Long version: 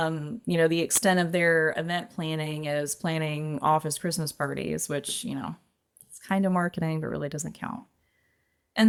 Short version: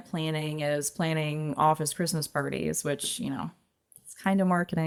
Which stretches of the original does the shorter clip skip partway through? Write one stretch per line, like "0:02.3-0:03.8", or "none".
none